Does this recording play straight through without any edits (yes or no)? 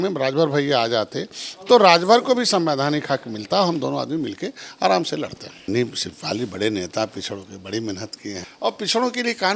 no